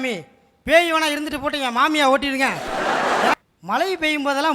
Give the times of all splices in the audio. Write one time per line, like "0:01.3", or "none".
0:03.3